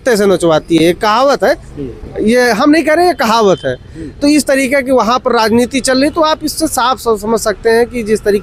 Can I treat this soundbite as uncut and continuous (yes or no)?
yes